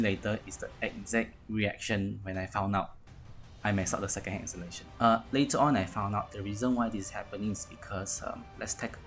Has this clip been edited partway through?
yes; 1 cut; at 4.8 s

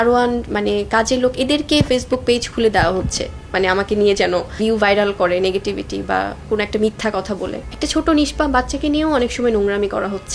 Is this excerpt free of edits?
no; 2 cuts; at 4.5 s, 7.6 s

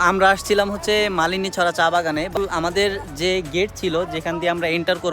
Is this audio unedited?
no; 1 cut; at 2.4 s

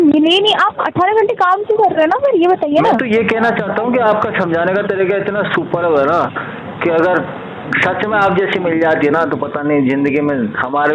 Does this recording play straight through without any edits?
yes; 0 cuts

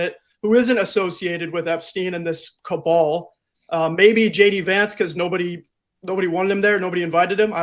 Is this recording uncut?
yes; 0 cuts

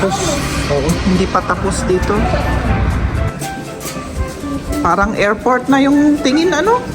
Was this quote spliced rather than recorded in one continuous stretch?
yes; 1 cut; at 3.3 s

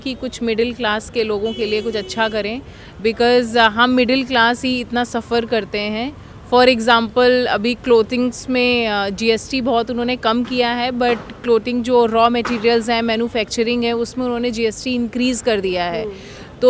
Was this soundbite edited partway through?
no; 0 cuts

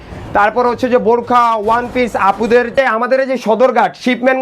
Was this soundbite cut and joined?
yes; 1 cut; at 2.7 s

